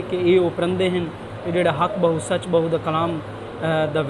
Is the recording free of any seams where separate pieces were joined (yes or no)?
yes